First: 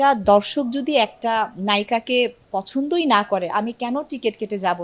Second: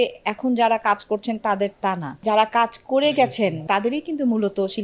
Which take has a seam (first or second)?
second